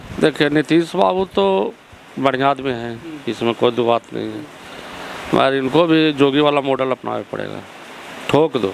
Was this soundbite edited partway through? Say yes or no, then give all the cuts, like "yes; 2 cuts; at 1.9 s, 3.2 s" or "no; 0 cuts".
no; 0 cuts